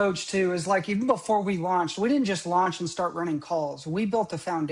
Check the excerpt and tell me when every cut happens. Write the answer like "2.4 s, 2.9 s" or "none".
none